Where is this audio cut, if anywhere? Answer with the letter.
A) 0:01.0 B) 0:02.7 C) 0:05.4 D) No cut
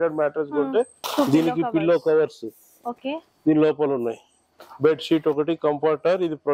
A